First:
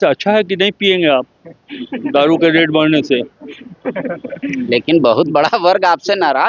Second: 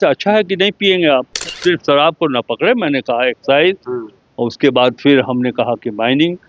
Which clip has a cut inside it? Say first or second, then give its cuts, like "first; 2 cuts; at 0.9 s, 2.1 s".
second; 1 cut; at 1.5 s